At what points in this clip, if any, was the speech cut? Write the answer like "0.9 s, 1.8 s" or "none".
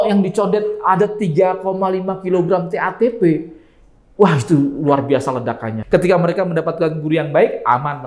5.7 s